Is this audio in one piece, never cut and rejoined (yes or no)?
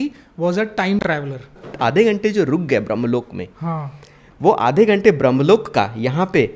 no